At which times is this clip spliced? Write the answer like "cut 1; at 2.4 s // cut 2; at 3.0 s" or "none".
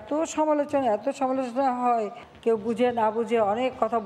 cut 1; at 2.2 s